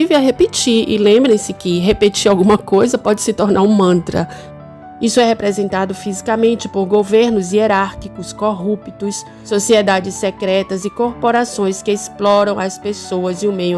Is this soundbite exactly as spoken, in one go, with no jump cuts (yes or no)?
no